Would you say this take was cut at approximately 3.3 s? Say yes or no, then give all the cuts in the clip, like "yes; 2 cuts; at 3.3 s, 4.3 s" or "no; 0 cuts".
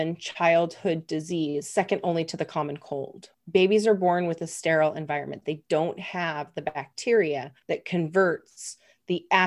yes; 2 cuts; at 3.3 s, 7.5 s